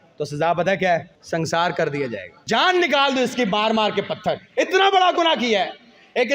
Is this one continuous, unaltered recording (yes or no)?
no